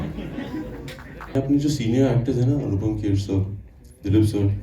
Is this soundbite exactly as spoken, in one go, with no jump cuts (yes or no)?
no